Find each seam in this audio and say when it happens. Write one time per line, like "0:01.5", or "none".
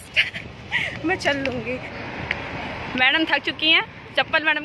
0:01.9

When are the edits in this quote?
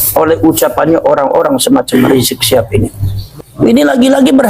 0:03.2

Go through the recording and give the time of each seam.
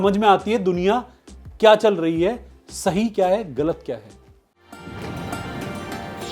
0:04.4

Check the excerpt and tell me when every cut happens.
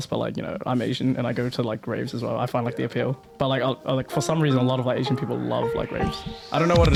none

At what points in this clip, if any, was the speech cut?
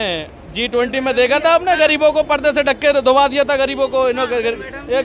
none

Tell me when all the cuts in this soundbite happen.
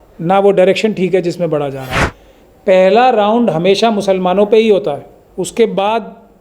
0:02.0

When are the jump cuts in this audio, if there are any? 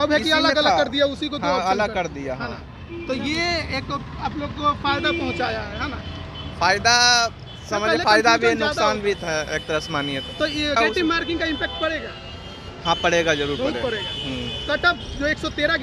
0:10.8

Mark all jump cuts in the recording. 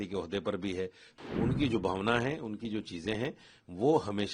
0:01.1

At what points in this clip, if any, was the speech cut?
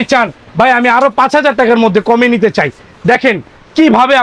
none

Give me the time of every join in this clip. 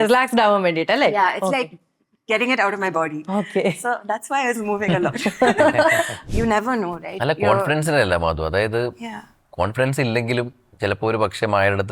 0:06.2

